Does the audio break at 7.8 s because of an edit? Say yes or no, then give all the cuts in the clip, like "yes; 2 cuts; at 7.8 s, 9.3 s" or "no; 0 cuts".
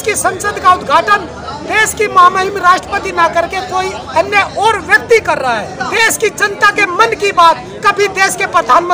no; 1 cut; at 5.7 s